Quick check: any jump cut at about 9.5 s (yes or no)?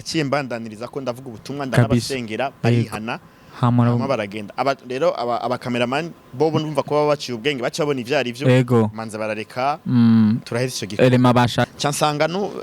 no